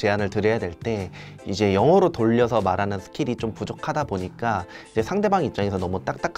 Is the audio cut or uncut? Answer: uncut